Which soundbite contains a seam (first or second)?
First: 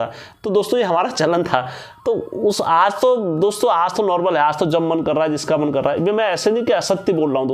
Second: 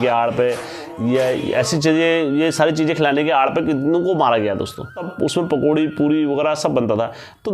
second